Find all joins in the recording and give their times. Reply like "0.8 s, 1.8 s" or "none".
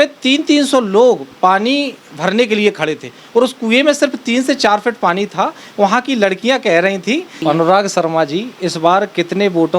7.4 s